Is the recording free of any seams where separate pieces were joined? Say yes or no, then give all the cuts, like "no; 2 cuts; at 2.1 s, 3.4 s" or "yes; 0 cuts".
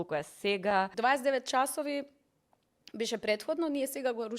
no; 1 cut; at 0.9 s